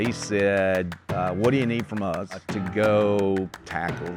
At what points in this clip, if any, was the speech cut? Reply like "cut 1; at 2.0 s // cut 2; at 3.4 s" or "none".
cut 1; at 1.0 s // cut 2; at 2.5 s